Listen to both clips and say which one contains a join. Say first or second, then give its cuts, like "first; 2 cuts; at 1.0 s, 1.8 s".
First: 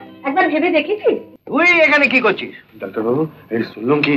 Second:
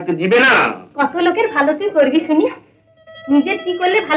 first; 1 cut; at 1.3 s